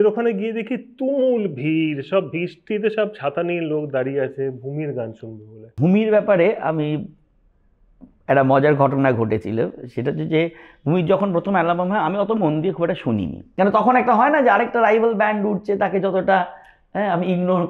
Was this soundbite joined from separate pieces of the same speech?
yes; 2 cuts; at 5.7 s, 13.4 s

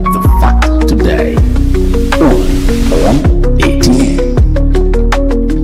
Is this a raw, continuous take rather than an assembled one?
yes; 0 cuts

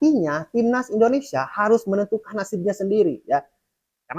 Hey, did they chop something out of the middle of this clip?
no; 0 cuts

